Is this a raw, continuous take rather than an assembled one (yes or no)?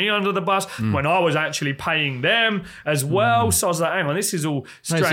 yes